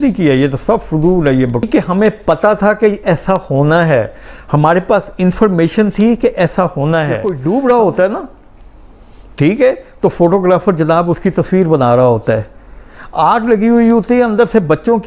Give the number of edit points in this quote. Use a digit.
2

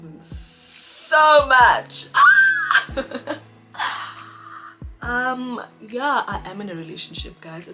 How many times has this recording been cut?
0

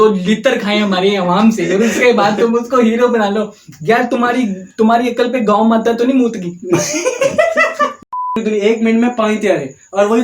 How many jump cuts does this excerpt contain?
1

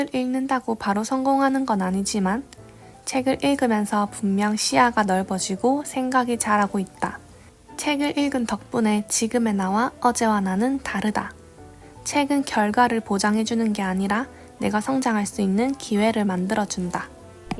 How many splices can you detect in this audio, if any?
0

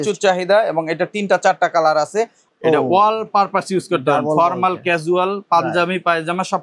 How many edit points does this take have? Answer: 1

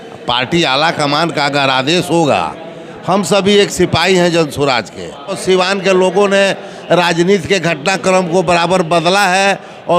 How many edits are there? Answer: 1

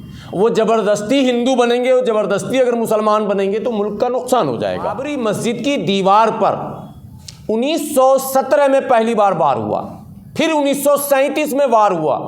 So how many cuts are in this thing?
1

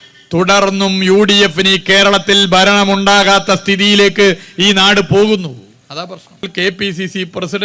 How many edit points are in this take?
1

